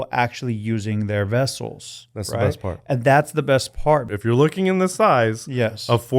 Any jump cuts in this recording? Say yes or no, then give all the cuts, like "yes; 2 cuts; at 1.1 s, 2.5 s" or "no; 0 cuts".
yes; 1 cut; at 4.1 s